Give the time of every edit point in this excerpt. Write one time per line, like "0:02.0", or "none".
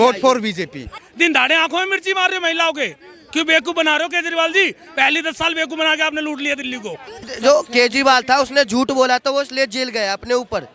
0:01.0
0:07.3